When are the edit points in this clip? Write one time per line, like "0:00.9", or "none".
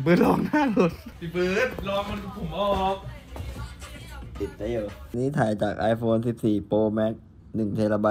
0:01.1
0:05.1